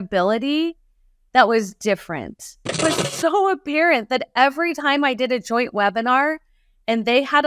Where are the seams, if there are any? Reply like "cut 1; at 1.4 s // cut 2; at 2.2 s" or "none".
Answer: cut 1; at 2.8 s